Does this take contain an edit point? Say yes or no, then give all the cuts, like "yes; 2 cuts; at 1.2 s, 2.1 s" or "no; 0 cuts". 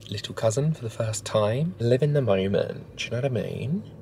yes; 1 cut; at 1.7 s